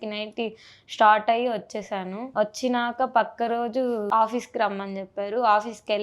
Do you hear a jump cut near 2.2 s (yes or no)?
yes